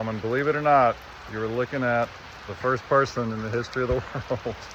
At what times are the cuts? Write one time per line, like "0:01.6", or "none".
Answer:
none